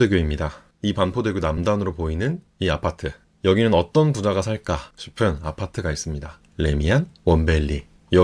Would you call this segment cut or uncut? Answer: uncut